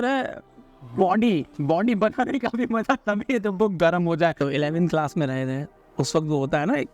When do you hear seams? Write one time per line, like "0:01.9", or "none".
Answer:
0:04.3